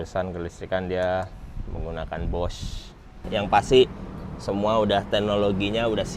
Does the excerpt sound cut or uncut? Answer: cut